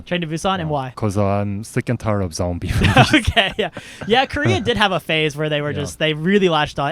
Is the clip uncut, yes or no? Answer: no